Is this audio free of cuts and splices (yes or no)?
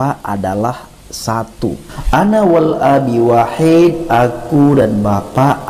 yes